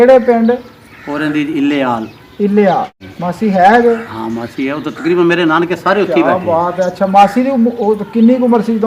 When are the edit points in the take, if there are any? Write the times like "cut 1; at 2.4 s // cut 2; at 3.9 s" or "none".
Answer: cut 1; at 3.0 s